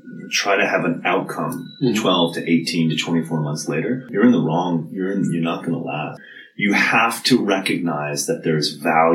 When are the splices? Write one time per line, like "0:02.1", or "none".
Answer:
0:04.1
0:06.3